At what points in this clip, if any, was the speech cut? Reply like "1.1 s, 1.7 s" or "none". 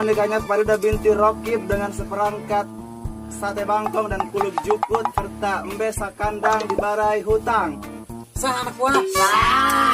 none